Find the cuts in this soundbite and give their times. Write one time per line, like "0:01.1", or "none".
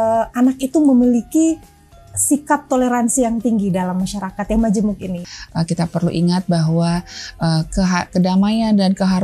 0:05.2